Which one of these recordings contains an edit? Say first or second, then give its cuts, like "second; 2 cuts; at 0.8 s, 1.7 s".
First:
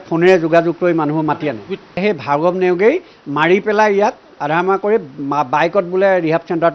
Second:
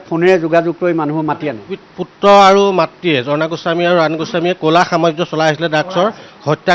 first; 1 cut; at 2.0 s